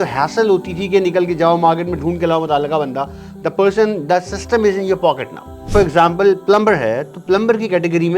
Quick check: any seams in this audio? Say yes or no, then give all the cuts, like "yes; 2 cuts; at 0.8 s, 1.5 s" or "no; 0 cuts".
yes; 1 cut; at 5.7 s